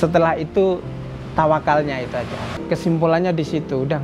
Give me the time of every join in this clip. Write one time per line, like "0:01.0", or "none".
0:02.5

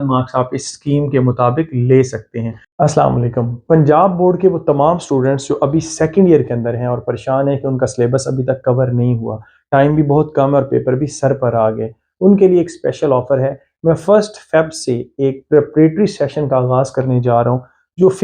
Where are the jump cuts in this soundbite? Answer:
0:02.6

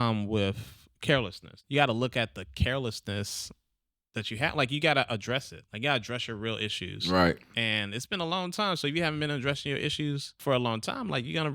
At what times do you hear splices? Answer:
0:01.6
0:10.3

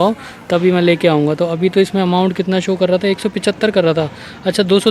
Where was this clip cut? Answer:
none

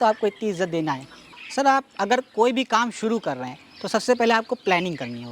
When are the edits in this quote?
0:01.1

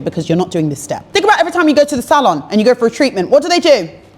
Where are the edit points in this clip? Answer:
0:01.0

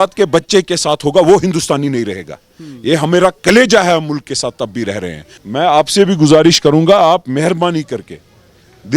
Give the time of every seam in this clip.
0:05.3

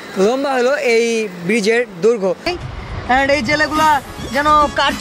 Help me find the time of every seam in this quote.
0:02.5

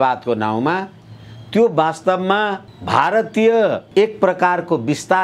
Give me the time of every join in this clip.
0:02.7
0:03.8

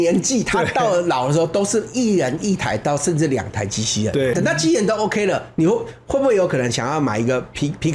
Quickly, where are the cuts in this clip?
0:04.3

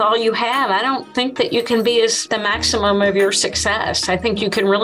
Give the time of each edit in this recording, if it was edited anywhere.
0:02.2

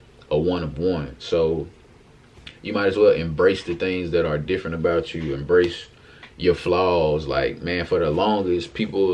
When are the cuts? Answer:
none

